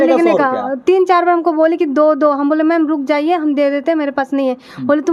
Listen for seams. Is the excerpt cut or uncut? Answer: uncut